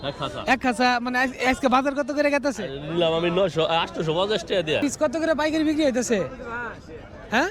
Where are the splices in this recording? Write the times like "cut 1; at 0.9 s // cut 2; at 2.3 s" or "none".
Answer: cut 1; at 4.8 s